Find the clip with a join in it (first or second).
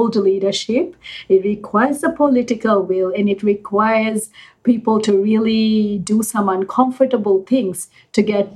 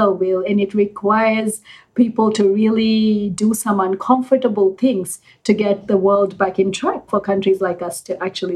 second